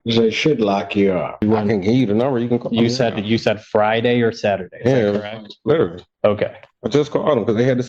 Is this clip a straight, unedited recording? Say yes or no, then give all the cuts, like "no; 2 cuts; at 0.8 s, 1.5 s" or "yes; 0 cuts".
no; 1 cut; at 1.4 s